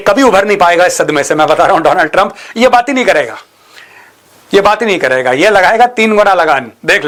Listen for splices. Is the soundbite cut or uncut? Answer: uncut